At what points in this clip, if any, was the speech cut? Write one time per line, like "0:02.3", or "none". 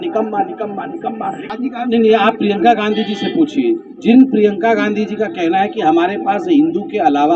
0:01.4